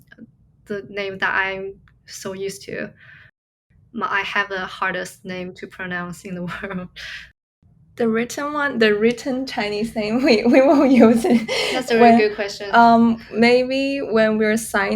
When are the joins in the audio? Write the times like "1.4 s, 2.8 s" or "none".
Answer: 3.5 s, 7.1 s